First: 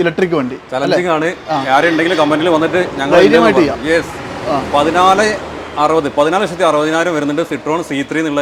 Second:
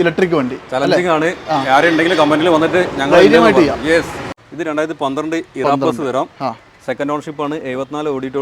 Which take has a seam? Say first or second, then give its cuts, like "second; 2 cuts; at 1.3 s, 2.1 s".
second; 1 cut; at 4.4 s